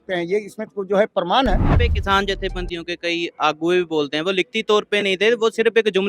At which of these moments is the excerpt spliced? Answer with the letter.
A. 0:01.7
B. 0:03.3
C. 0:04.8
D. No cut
A